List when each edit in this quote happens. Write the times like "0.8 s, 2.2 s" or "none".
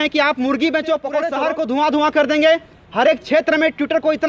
1.3 s